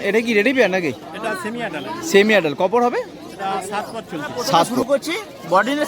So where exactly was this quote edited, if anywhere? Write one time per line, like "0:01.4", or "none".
0:04.7